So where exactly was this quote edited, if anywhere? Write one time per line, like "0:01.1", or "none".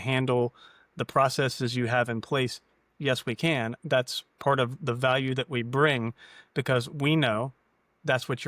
none